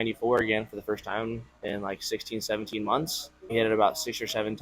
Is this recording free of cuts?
no; 1 cut; at 3.5 s

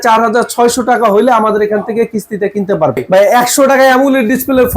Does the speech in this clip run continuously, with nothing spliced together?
no; 1 cut; at 3.0 s

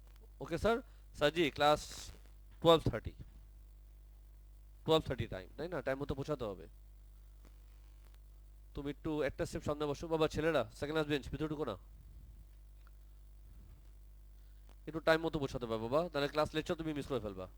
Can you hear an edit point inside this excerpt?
no; 0 cuts

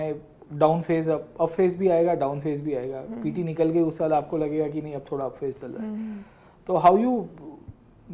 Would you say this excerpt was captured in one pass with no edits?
yes; 0 cuts

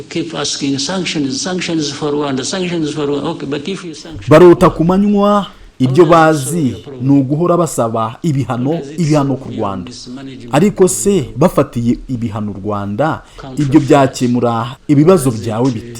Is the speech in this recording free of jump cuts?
no; 2 cuts; at 3.9 s, 5.6 s

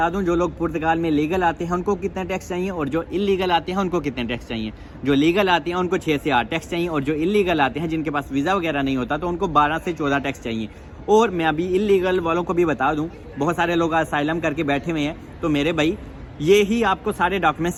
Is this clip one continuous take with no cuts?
yes; 0 cuts

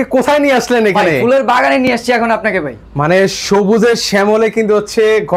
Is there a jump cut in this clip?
no; 0 cuts

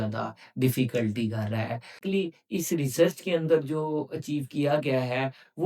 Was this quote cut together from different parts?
yes; 1 cut; at 2.0 s

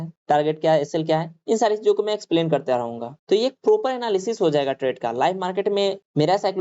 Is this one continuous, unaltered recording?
no; 1 cut; at 3.1 s

